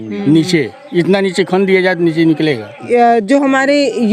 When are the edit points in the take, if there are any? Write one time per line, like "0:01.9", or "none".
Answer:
0:02.8